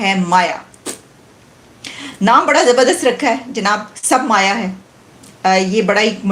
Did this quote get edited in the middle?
no; 0 cuts

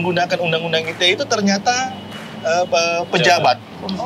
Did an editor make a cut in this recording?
no; 0 cuts

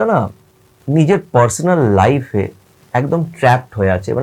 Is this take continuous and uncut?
yes; 0 cuts

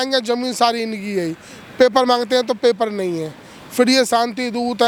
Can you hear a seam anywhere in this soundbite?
no; 0 cuts

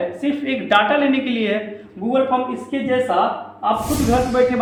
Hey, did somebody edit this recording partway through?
no; 0 cuts

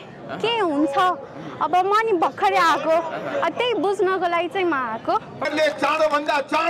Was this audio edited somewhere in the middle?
yes; 1 cut; at 5.3 s

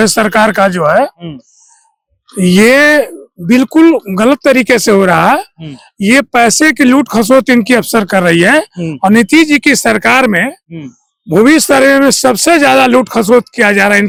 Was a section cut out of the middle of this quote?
no; 0 cuts

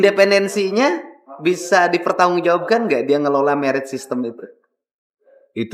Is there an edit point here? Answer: no; 0 cuts

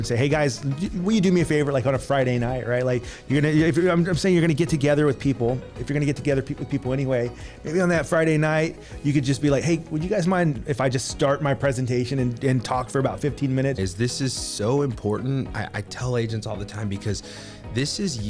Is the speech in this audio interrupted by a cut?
yes; 1 cut; at 13.9 s

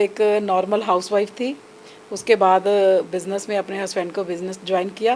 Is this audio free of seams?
yes; 0 cuts

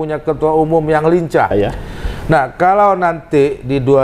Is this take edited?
yes; 1 cut; at 1.5 s

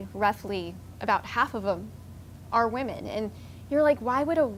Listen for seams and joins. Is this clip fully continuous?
yes; 0 cuts

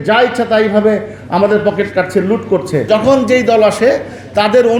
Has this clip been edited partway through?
yes; 1 cut; at 2.9 s

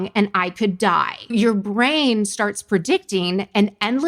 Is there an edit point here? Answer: yes; 1 cut; at 1.2 s

